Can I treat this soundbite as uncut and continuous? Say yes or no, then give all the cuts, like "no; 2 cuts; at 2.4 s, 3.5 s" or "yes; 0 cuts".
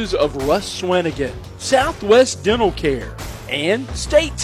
yes; 0 cuts